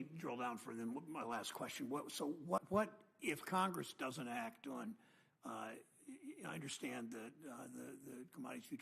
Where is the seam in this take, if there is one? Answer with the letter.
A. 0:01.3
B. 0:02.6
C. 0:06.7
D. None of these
B